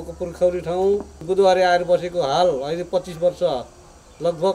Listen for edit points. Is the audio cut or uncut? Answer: cut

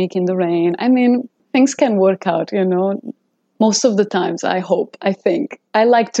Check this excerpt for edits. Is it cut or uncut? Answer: cut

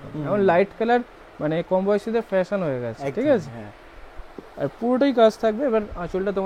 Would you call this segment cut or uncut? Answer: uncut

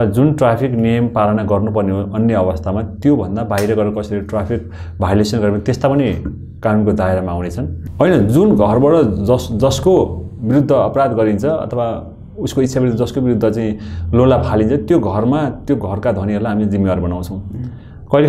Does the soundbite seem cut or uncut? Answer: cut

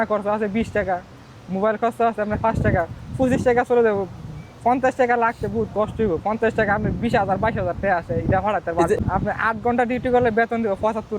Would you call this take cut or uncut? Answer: cut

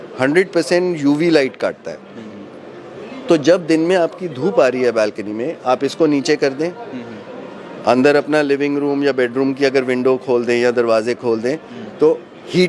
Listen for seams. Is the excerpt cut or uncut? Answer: uncut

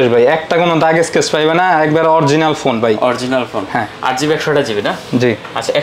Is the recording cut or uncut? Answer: uncut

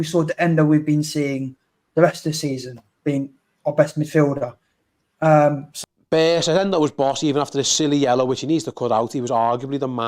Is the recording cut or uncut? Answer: cut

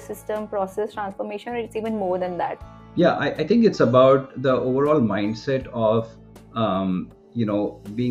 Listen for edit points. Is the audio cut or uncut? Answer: uncut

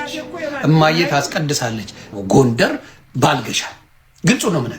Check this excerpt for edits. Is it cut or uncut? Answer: cut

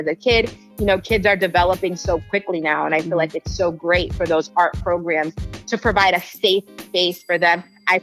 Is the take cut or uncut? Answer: uncut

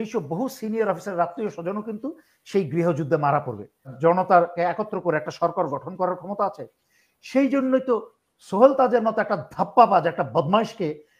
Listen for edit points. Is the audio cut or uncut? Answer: cut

